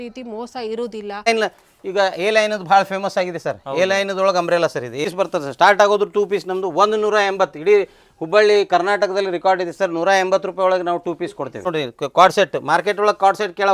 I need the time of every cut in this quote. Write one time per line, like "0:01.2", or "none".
0:01.3
0:05.0
0:11.7